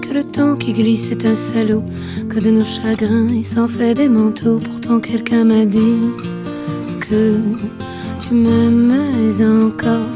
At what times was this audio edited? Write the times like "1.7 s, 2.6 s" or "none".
none